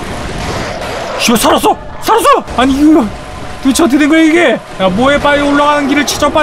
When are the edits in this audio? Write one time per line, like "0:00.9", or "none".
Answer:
0:02.5
0:04.7